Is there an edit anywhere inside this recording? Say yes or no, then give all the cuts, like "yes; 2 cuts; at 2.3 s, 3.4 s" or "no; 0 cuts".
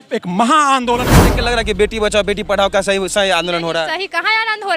yes; 1 cut; at 1.2 s